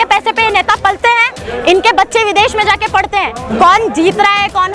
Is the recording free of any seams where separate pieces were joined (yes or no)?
no